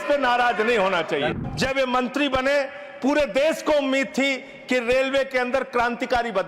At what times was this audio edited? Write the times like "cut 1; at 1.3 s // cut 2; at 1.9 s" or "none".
cut 1; at 1.3 s